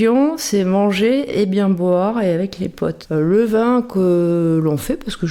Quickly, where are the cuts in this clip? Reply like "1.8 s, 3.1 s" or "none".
2.9 s

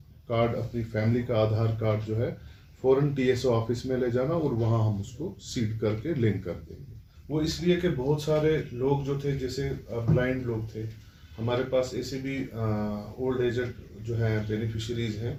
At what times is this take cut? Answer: none

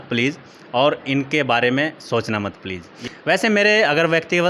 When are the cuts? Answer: 3.1 s

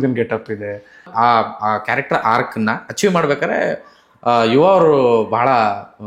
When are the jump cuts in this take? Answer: 1.1 s

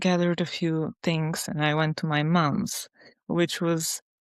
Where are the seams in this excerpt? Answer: none

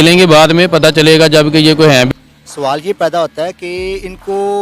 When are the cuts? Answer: 2.1 s

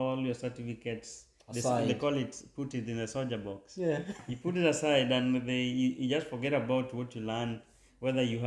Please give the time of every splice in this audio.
none

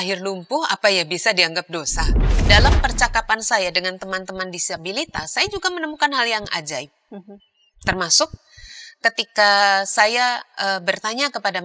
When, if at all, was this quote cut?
2.4 s

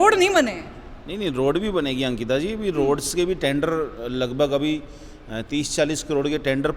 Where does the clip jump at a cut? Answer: none

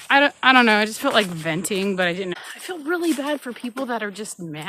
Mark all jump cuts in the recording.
2.4 s

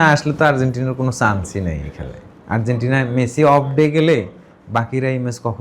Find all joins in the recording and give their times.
none

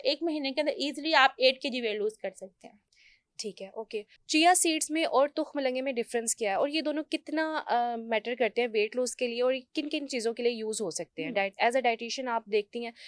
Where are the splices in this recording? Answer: none

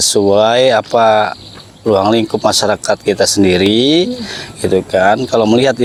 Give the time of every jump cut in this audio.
none

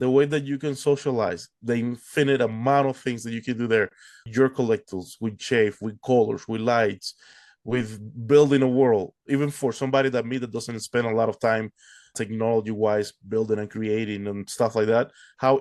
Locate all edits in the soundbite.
1.5 s, 12.2 s

